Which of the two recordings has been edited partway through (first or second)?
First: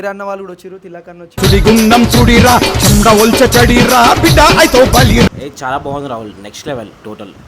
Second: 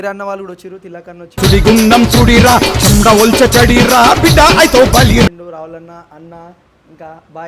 first